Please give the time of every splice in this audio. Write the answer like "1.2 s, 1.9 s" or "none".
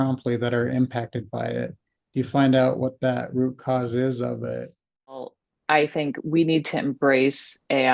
5.3 s